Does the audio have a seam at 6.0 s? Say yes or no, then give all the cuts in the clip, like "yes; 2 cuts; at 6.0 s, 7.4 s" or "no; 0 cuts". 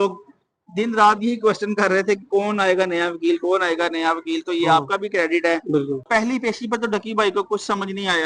yes; 1 cut; at 6.0 s